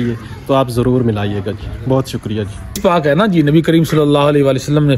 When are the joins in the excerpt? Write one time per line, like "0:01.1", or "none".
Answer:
0:02.8